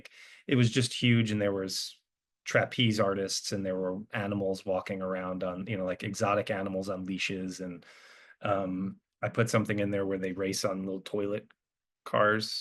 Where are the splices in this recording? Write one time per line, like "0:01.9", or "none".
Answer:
none